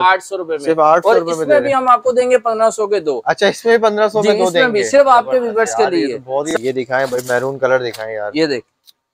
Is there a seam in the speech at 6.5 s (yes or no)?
yes